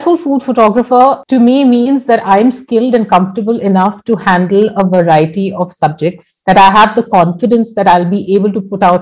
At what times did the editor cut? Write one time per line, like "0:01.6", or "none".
0:01.2
0:06.3